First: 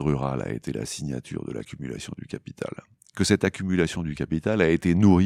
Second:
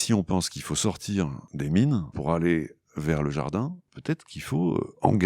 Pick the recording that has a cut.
second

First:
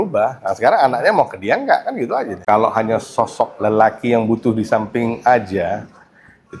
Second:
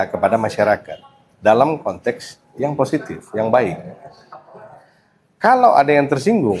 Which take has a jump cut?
first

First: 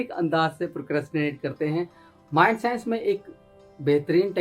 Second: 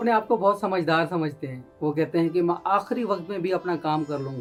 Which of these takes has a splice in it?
first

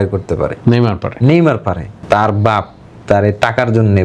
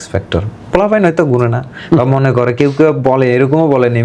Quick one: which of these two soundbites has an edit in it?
first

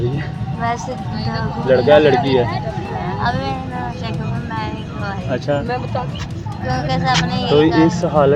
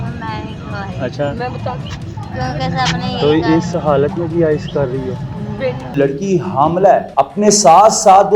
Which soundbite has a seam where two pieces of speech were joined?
second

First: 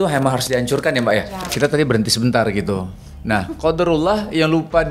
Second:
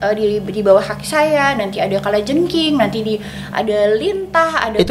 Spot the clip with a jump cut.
first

